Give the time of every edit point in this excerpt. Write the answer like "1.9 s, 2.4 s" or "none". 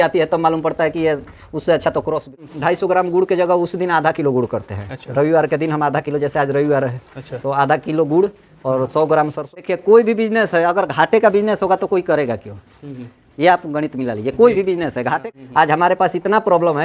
2.4 s, 9.5 s, 15.2 s